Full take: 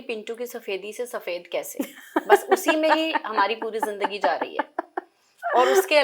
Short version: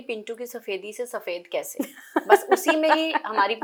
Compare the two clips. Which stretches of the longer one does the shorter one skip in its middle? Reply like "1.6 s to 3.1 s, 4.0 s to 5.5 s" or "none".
none